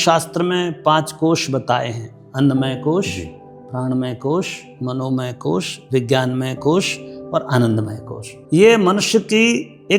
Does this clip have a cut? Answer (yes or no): yes